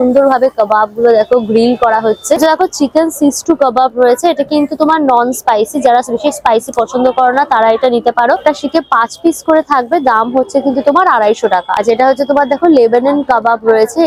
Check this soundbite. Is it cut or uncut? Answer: uncut